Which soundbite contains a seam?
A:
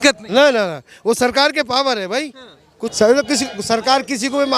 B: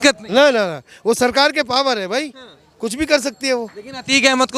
A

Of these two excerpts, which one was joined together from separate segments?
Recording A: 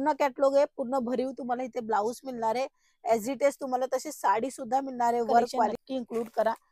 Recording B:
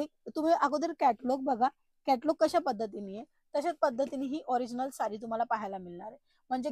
A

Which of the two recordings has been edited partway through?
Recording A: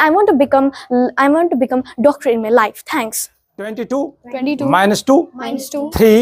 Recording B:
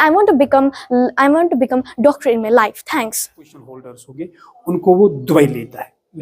B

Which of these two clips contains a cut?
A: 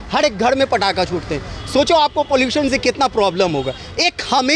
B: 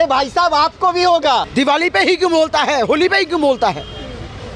B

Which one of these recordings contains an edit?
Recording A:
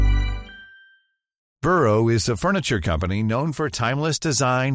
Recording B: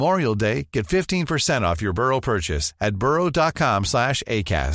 A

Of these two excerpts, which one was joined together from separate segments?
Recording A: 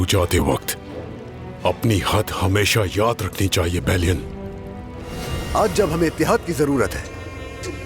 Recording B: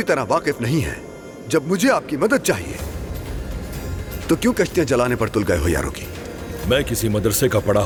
A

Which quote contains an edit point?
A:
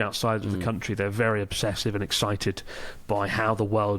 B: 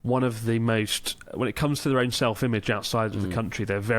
B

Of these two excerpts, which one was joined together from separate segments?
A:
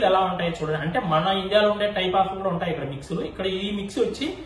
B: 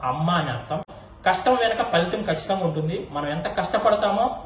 B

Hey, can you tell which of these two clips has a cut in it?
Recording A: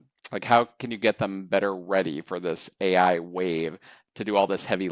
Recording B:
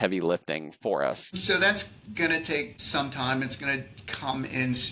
B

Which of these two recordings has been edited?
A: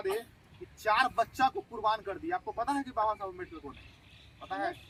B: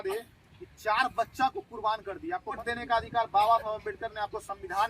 B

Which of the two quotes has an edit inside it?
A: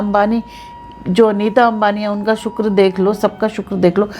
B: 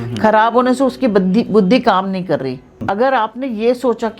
B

